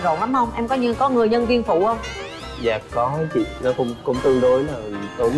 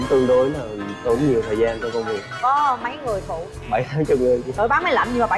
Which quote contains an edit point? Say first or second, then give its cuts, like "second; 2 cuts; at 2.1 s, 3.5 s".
second; 3 cuts; at 2.3 s, 3.5 s, 4.5 s